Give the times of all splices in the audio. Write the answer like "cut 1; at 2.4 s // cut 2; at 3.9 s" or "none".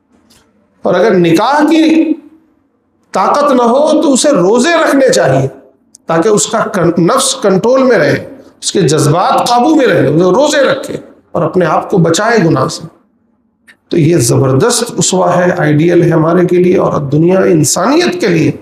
none